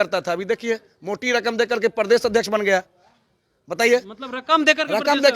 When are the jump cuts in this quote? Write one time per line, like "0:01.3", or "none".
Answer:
none